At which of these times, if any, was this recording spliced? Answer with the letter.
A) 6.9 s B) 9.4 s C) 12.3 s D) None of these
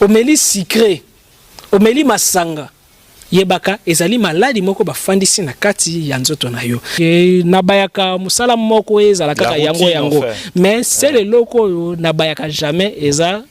A